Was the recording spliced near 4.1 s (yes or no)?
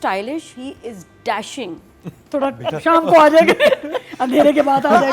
no